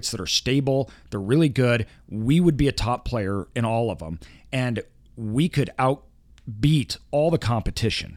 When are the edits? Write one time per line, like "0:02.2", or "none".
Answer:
none